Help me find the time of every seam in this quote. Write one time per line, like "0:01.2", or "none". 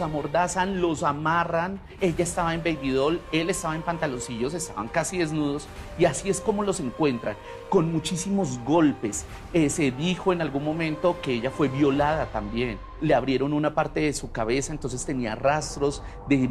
none